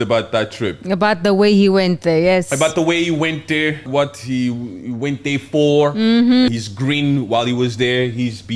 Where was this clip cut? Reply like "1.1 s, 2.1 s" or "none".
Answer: 3.8 s, 6.5 s